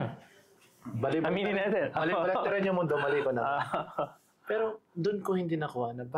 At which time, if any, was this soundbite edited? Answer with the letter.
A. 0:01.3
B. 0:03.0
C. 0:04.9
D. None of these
D